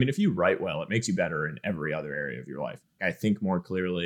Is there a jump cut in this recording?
yes; 1 cut; at 3.0 s

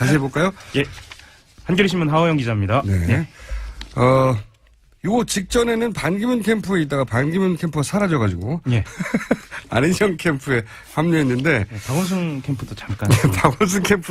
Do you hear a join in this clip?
yes; 1 cut; at 13.1 s

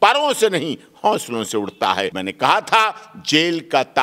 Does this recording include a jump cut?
yes; 1 cut; at 2.2 s

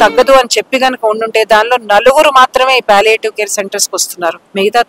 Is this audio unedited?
yes; 0 cuts

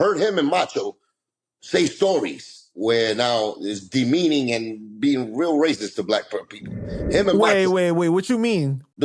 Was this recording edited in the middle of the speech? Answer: no; 0 cuts

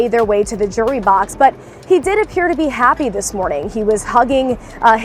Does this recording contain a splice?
no; 0 cuts

